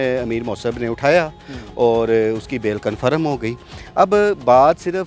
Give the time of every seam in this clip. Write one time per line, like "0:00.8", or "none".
none